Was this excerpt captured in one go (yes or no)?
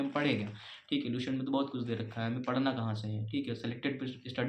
yes